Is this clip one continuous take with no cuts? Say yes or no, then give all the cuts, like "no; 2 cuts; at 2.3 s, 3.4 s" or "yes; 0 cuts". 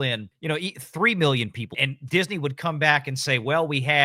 no; 1 cut; at 1.8 s